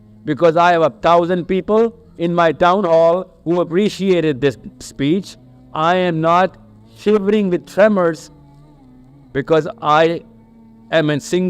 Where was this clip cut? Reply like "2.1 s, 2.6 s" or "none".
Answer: none